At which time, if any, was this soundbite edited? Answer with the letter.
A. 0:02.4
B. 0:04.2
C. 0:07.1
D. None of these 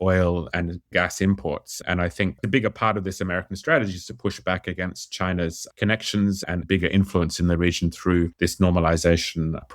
A